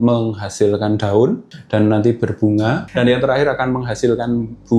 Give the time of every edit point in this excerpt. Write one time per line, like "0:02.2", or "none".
0:01.5
0:02.8